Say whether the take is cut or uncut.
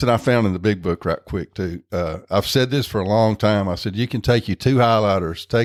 uncut